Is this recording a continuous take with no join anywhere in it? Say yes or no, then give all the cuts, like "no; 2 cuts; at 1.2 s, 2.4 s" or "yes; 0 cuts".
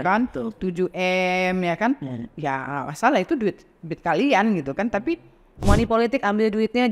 no; 1 cut; at 5.6 s